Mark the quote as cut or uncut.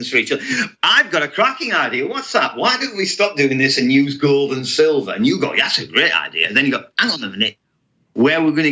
uncut